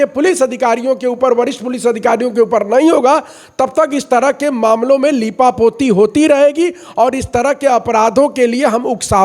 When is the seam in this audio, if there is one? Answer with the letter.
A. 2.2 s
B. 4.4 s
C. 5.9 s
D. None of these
D